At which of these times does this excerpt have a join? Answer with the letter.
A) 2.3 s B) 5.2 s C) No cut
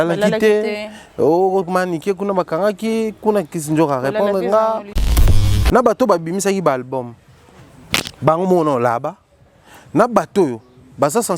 B